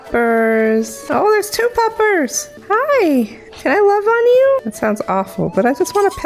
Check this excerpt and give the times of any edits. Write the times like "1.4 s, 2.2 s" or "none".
1.0 s, 2.5 s, 4.7 s